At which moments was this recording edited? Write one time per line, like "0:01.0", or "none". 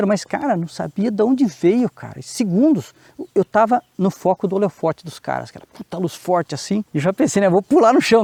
none

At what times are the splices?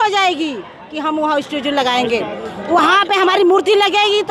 none

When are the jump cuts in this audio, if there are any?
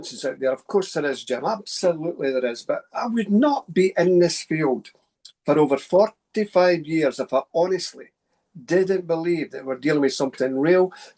none

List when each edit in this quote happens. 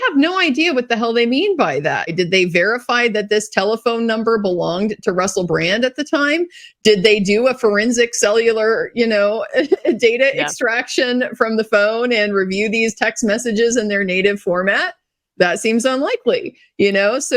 0:02.1

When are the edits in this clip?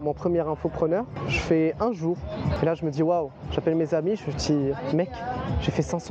0:01.2
0:02.6

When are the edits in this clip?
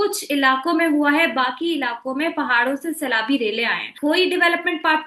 0:03.9

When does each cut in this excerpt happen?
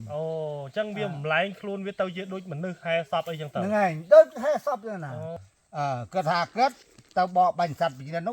0:05.3

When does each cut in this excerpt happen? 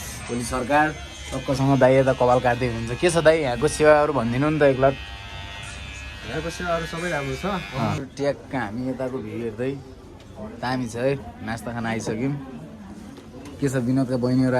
0:08.0

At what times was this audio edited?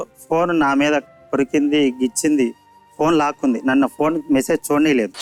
none

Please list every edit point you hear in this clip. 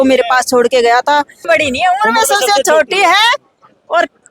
0:01.4

